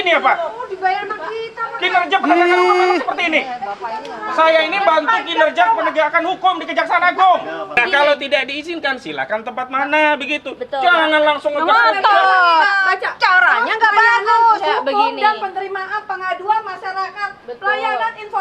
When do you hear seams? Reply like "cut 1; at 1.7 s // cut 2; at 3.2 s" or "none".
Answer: cut 1; at 7.7 s